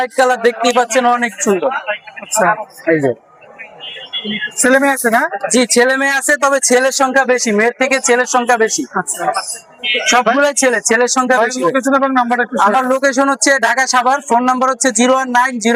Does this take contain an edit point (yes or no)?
no